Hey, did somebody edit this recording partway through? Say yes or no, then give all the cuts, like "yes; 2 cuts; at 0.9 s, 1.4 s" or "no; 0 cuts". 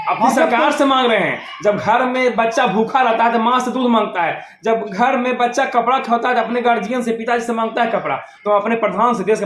no; 0 cuts